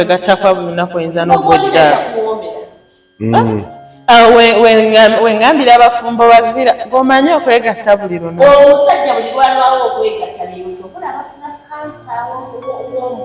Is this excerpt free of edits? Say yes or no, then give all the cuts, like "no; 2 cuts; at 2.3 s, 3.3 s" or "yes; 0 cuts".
yes; 0 cuts